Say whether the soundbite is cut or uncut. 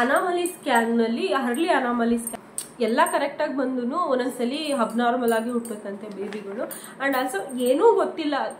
cut